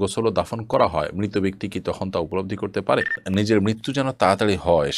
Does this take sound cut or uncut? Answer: cut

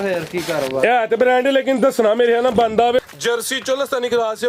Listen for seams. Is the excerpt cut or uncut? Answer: cut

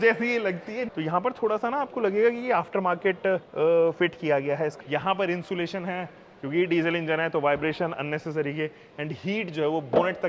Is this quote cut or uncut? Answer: cut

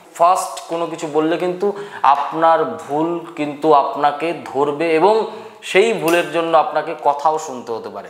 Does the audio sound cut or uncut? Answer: uncut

